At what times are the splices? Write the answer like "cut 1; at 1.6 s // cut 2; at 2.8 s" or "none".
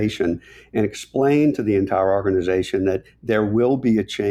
none